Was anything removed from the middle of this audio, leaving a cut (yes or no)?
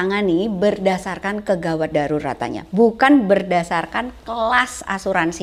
no